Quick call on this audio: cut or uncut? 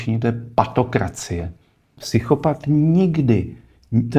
cut